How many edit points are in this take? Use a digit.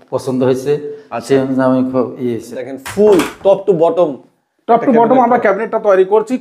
1